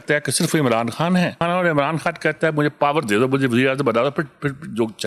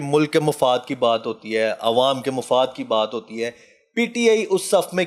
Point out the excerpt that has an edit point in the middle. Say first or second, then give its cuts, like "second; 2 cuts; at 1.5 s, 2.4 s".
first; 1 cut; at 1.4 s